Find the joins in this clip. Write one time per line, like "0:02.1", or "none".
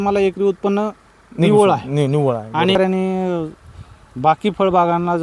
0:02.8